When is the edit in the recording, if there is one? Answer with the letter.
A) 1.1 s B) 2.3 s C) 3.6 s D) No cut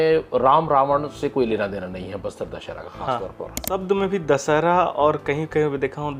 C